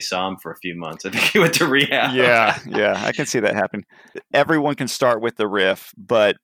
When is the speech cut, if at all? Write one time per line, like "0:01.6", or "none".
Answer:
0:04.2